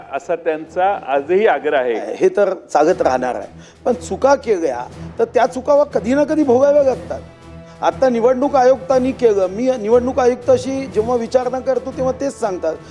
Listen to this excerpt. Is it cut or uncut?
cut